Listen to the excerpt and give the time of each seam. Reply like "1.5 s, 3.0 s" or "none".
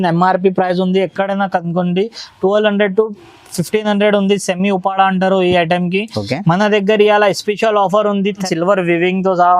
8.4 s